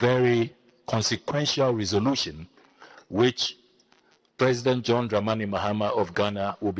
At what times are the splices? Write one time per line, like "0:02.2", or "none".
none